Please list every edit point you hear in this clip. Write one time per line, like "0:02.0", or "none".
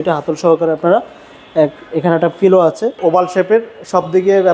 0:03.0